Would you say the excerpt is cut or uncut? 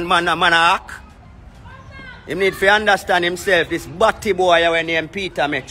uncut